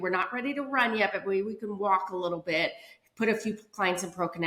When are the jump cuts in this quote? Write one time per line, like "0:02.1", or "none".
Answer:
none

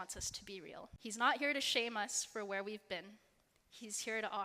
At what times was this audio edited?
0:00.9

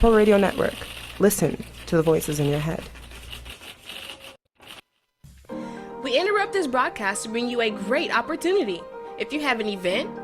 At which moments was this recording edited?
0:05.0

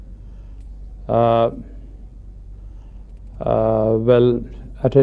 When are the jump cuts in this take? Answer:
0:03.3

